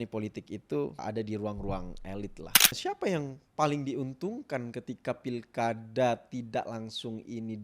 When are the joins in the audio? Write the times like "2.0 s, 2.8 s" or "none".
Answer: 2.8 s